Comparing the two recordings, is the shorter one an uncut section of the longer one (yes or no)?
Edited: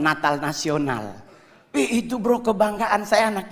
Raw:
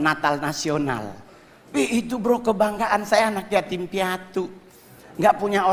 yes